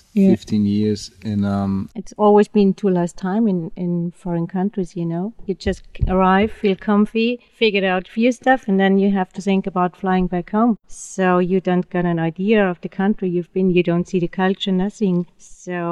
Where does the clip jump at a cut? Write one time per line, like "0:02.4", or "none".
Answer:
none